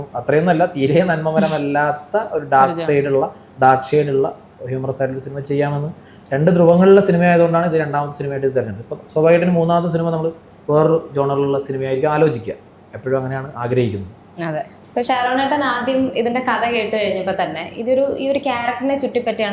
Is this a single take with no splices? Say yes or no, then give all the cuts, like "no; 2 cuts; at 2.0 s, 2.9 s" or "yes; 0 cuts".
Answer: yes; 0 cuts